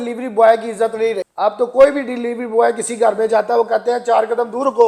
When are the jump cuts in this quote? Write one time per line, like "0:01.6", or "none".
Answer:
none